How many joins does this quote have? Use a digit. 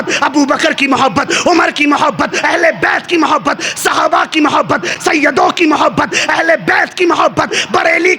1